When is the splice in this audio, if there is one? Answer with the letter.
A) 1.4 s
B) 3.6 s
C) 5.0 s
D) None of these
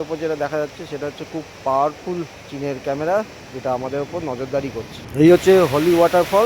C